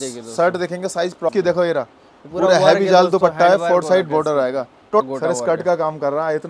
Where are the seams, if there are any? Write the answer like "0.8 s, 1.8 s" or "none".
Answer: 1.3 s, 5.0 s